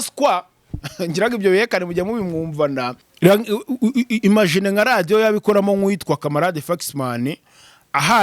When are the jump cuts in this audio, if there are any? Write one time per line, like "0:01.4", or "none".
0:03.0